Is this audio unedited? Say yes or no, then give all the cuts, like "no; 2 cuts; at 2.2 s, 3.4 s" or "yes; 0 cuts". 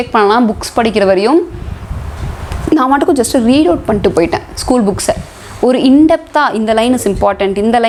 yes; 0 cuts